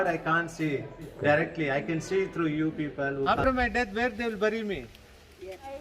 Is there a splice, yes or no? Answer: yes